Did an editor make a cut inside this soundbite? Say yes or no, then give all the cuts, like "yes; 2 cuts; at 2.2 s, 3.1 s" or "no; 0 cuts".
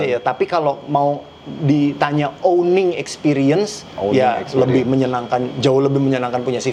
no; 0 cuts